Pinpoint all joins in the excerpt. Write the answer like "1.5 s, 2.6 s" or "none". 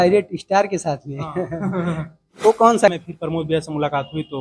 2.9 s